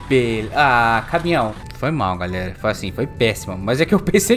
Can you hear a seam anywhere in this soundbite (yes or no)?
yes